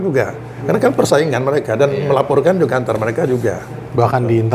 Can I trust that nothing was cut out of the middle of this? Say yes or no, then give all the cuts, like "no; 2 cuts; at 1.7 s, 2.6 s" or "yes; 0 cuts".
yes; 0 cuts